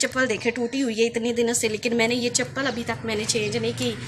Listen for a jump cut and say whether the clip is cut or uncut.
uncut